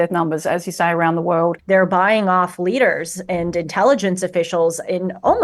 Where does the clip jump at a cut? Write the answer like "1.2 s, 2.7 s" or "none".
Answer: 1.6 s